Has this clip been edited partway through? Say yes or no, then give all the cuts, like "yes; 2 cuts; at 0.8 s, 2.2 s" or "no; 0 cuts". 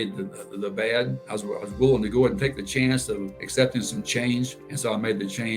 yes; 3 cuts; at 1.2 s, 3.4 s, 4.6 s